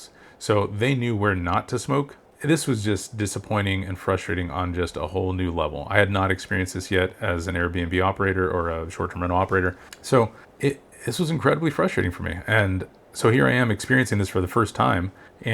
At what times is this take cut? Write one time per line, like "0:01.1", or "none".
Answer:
0:09.9